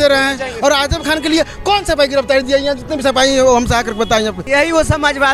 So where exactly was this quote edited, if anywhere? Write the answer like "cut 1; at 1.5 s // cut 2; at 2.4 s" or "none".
cut 1; at 4.4 s